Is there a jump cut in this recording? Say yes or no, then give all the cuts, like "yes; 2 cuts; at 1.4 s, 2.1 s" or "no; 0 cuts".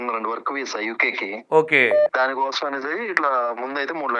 yes; 1 cut; at 2.1 s